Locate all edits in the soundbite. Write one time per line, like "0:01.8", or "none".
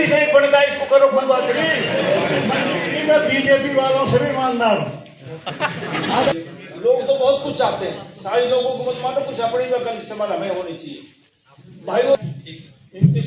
0:06.3
0:12.2